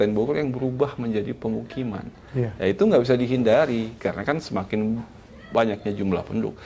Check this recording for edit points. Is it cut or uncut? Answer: uncut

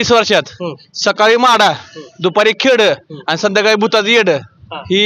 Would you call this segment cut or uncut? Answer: uncut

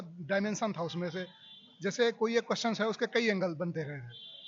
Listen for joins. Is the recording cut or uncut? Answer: uncut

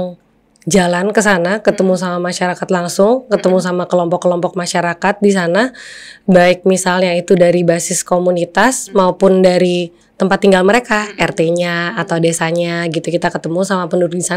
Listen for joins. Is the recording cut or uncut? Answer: uncut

